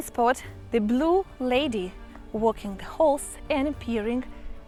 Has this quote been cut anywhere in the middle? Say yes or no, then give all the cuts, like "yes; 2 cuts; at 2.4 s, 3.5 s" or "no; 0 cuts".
no; 0 cuts